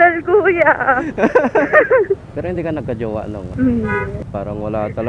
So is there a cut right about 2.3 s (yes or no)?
yes